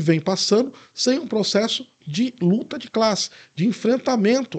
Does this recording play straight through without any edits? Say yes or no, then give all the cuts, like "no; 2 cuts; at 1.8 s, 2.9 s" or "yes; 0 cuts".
yes; 0 cuts